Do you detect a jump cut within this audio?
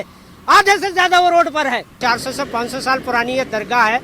yes; 1 cut; at 2.0 s

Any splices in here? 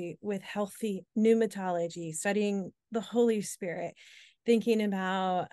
no; 0 cuts

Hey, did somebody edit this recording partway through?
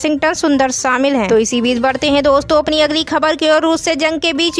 no; 0 cuts

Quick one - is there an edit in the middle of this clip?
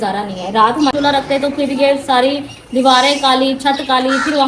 yes; 1 cut; at 0.9 s

